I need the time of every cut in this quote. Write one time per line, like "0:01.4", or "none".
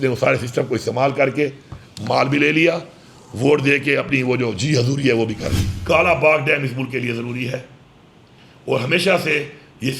0:05.7